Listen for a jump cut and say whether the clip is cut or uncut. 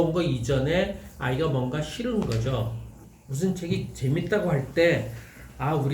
cut